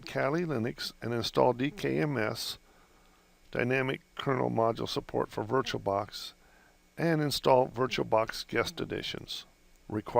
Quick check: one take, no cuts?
no; 1 cut; at 5.2 s

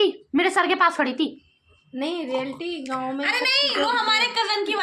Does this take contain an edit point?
no; 0 cuts

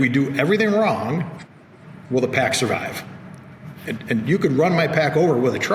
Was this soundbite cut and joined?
no; 0 cuts

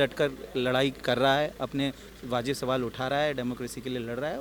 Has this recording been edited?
no; 0 cuts

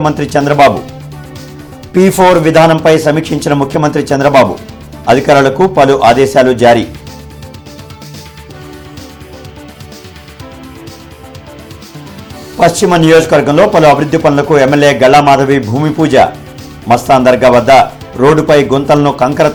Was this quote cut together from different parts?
no; 0 cuts

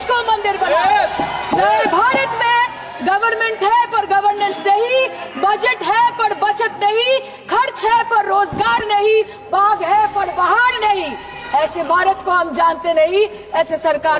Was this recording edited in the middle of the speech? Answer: no; 0 cuts

